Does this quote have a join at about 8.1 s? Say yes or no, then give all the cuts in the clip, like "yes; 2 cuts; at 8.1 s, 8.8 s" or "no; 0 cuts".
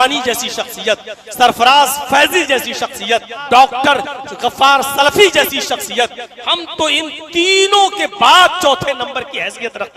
no; 1 cut; at 3.3 s